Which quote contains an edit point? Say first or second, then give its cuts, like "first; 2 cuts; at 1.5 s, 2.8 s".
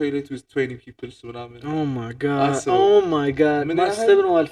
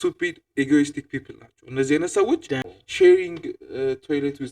second; 1 cut; at 2.7 s